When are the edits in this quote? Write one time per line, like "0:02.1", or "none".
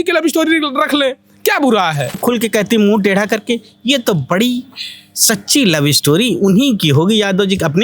0:02.2